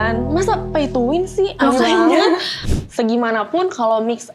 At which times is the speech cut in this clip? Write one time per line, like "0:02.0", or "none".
0:02.6